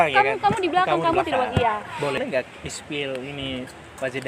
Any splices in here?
yes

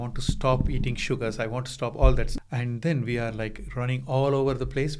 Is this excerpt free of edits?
no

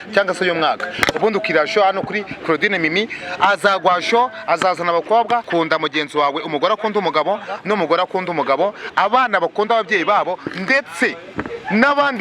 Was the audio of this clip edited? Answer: yes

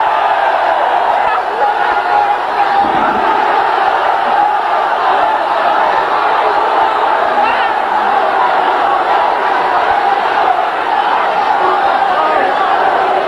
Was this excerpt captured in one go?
yes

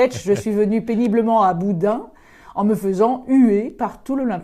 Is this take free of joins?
yes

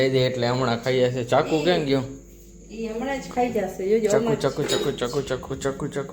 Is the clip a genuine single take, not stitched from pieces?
yes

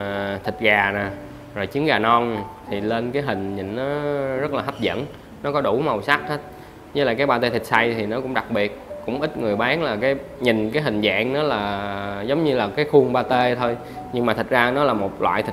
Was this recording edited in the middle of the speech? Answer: no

